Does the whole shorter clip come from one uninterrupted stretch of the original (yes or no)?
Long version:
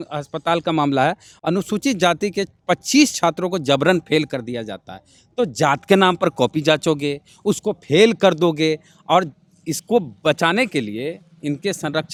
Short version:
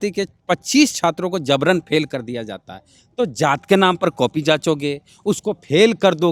yes